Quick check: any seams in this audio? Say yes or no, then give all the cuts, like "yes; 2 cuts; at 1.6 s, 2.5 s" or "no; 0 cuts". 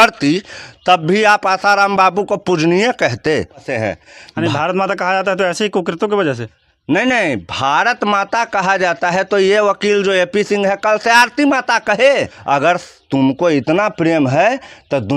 yes; 2 cuts; at 3.7 s, 12.3 s